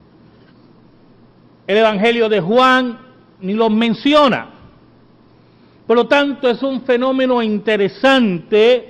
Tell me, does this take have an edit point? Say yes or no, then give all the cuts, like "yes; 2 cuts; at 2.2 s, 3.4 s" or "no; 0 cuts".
no; 0 cuts